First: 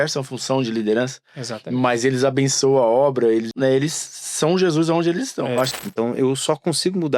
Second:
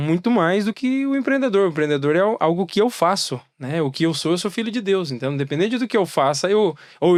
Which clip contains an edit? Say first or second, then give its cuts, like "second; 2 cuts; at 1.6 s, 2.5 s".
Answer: first; 2 cuts; at 3.5 s, 5.7 s